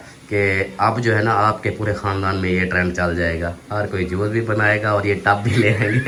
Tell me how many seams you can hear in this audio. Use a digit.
0